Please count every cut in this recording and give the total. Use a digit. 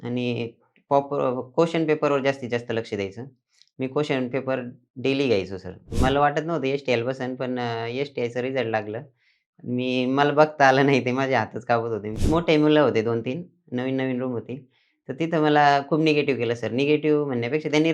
2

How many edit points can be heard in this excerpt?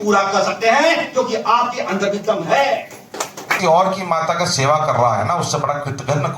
1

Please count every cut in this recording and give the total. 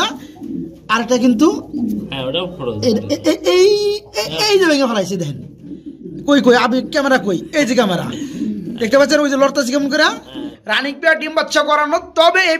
1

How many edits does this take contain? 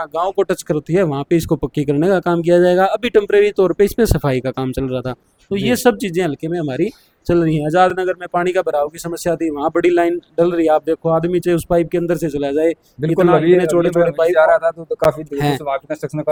0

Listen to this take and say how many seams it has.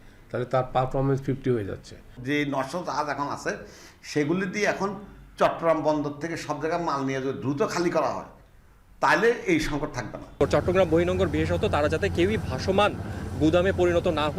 2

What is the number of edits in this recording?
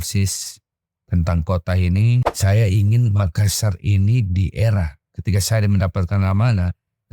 1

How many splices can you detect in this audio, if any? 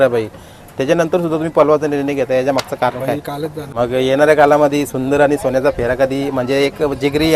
1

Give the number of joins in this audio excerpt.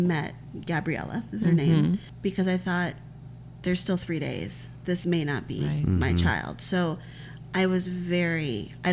0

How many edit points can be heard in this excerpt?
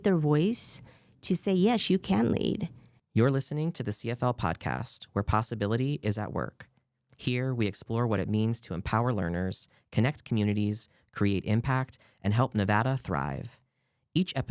1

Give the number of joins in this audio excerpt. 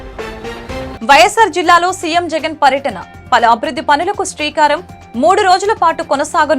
0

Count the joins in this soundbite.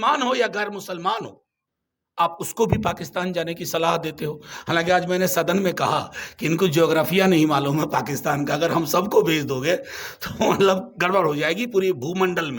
0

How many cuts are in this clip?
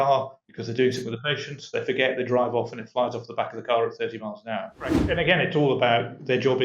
1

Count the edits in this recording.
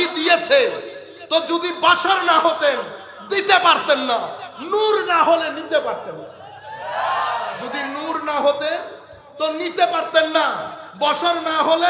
0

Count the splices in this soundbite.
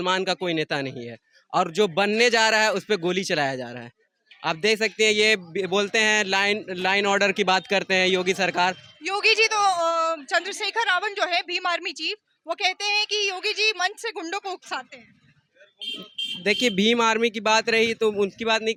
0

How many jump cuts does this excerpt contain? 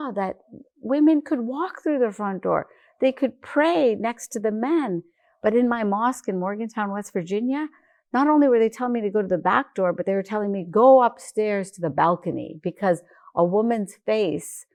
0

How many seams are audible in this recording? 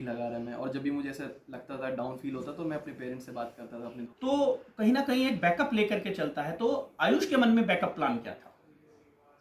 1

